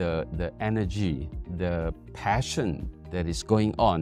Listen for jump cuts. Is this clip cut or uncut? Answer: uncut